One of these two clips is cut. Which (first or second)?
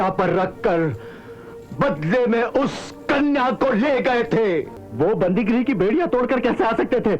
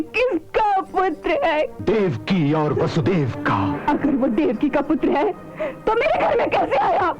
second